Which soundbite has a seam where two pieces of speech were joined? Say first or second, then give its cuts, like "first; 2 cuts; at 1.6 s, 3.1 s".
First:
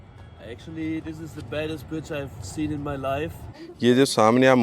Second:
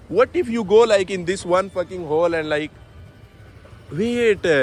first; 1 cut; at 3.4 s